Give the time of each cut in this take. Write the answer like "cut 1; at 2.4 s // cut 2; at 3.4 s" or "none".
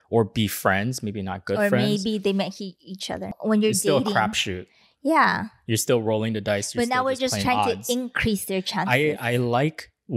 cut 1; at 3.3 s